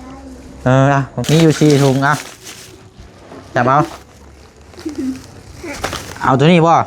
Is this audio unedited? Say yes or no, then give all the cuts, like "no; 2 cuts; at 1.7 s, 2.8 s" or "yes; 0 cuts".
no; 1 cut; at 1.2 s